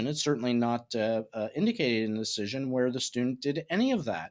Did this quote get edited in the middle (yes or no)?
no